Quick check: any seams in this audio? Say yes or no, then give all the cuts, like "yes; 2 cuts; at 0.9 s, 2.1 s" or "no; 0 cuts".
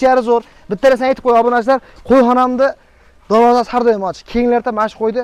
no; 0 cuts